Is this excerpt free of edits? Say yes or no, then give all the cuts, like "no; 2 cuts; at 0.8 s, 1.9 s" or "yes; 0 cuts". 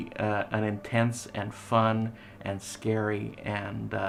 yes; 0 cuts